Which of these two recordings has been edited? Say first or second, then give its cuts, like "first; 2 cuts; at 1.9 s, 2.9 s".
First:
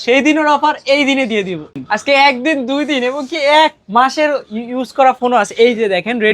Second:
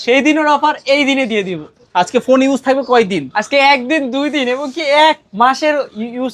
first; 1 cut; at 1.8 s